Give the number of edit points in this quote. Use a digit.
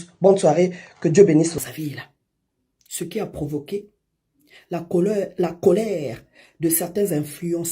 1